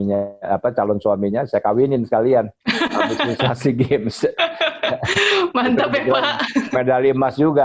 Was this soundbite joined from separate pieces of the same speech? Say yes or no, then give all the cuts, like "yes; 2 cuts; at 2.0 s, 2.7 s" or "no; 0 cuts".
no; 0 cuts